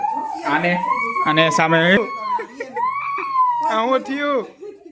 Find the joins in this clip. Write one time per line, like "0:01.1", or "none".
0:02.0